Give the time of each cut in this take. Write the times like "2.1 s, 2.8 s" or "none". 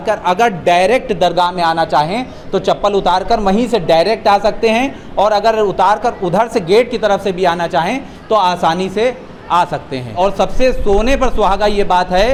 none